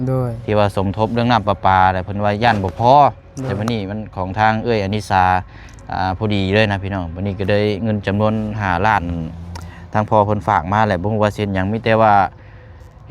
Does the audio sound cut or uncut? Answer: uncut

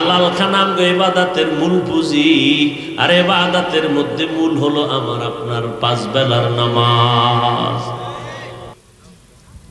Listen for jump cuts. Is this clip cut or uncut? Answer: cut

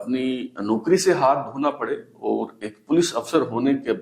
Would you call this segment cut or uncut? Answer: uncut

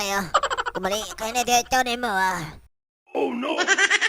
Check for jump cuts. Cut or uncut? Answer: cut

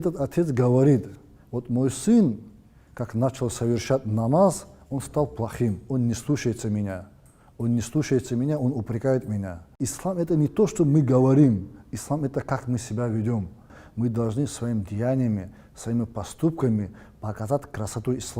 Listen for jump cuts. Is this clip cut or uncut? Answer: cut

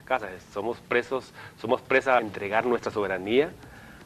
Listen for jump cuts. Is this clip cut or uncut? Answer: uncut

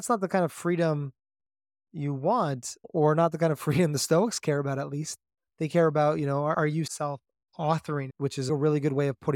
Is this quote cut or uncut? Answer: cut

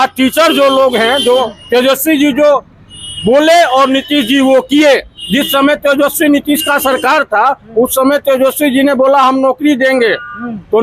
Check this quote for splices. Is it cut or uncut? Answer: uncut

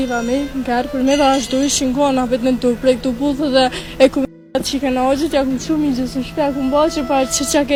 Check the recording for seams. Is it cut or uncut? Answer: uncut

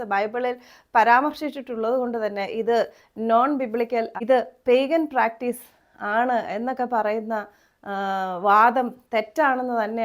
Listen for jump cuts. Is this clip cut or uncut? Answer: uncut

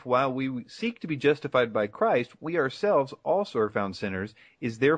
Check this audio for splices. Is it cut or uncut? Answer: uncut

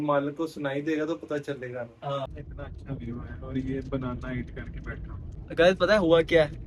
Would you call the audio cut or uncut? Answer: cut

